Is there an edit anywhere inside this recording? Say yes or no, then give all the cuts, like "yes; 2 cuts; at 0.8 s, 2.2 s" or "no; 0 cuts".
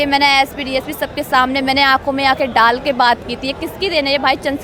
no; 0 cuts